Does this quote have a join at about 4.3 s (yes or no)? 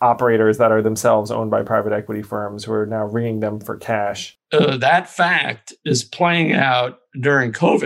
yes